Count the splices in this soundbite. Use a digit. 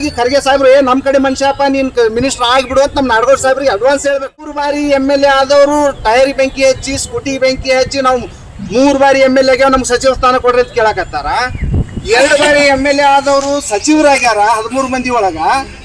1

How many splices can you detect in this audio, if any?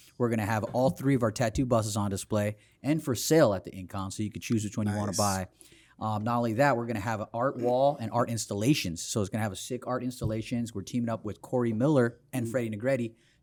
0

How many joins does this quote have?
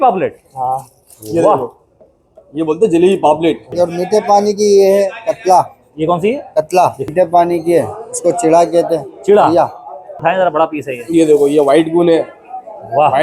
3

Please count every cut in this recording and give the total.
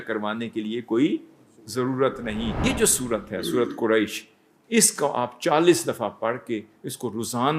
1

